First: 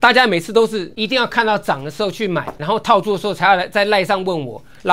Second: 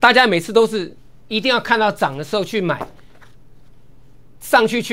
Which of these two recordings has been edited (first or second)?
first